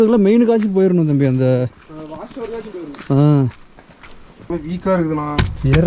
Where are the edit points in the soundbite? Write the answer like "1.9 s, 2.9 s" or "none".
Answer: 4.5 s